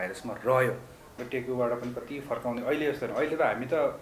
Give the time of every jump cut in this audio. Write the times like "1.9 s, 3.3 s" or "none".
1.1 s